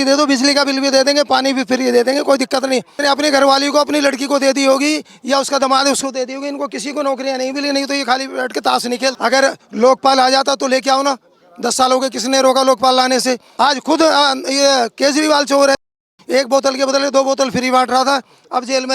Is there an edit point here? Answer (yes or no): yes